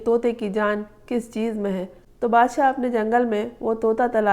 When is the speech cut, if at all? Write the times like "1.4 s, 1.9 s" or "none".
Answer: 2.0 s